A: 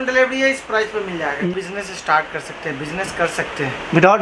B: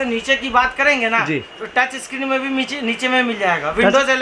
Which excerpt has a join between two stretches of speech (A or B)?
A